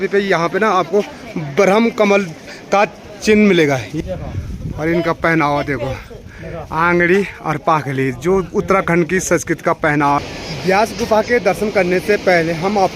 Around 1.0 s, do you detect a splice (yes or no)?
no